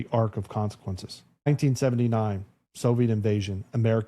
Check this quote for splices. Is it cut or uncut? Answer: cut